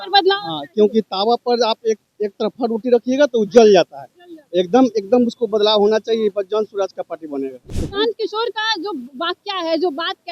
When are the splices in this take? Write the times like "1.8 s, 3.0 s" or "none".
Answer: 7.6 s